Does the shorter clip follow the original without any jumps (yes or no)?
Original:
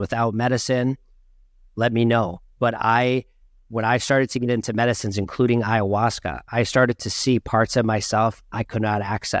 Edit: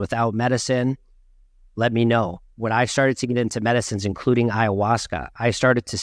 no